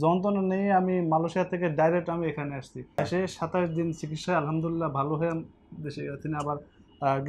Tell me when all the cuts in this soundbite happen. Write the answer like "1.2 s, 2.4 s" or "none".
2.9 s